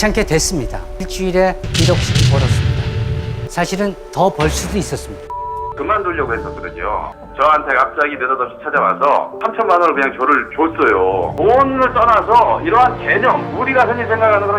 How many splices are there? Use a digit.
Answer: 1